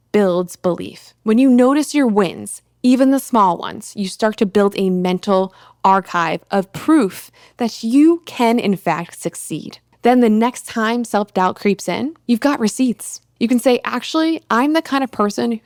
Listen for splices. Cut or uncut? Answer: uncut